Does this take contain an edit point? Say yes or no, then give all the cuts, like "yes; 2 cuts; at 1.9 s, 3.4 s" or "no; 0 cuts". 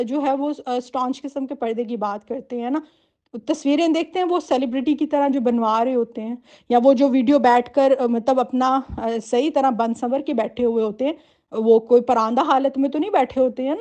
no; 0 cuts